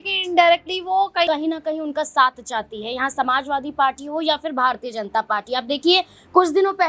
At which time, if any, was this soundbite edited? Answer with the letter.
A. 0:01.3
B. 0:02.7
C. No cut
A